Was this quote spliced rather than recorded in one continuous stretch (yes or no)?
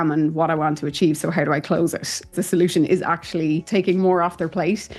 yes